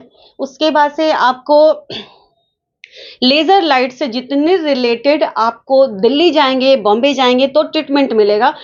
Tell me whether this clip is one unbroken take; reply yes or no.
yes